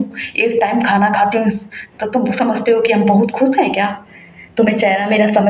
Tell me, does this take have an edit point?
no; 0 cuts

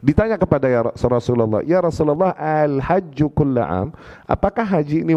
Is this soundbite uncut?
yes; 0 cuts

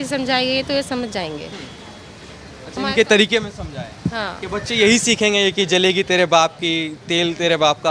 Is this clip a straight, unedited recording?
yes; 0 cuts

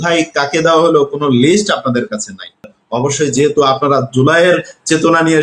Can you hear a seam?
yes; 1 cut; at 2.8 s

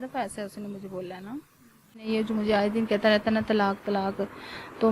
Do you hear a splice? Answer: yes; 1 cut; at 2.1 s

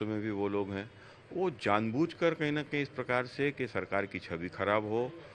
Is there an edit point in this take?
no; 0 cuts

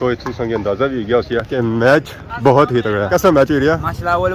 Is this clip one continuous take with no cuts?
no; 1 cut; at 3.1 s

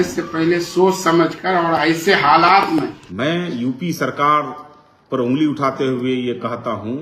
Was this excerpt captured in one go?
no; 1 cut; at 3.0 s

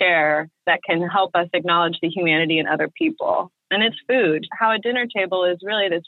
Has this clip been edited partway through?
yes; 2 cuts; at 0.8 s, 4.5 s

